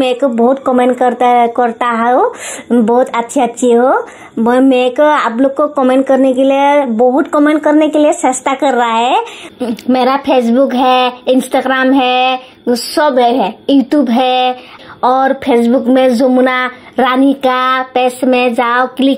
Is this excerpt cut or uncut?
cut